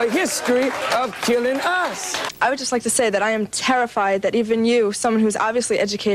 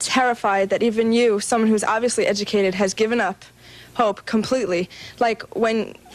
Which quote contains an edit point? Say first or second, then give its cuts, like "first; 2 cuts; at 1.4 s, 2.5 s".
first; 1 cut; at 2.3 s